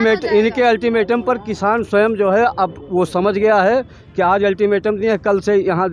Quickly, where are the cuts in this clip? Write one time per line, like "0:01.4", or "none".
none